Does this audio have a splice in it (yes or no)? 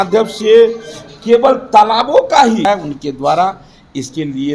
yes